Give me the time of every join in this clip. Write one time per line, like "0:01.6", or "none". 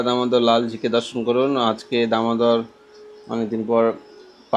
none